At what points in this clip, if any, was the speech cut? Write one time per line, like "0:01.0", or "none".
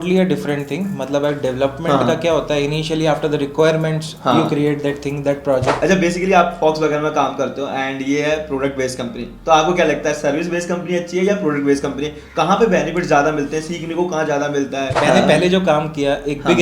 0:05.8
0:14.9